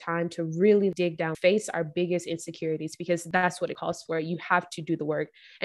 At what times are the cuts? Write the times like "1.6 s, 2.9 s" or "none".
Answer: 1.1 s, 3.3 s